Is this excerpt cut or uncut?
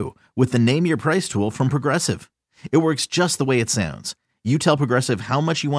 uncut